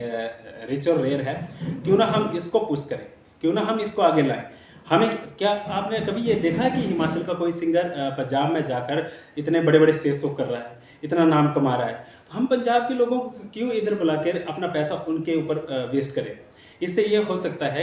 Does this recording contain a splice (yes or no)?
no